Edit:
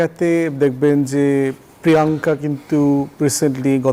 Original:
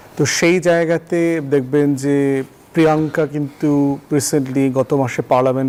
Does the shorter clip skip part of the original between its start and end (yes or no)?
no